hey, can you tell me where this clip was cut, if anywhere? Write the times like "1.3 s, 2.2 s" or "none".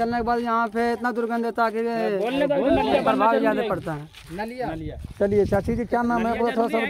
none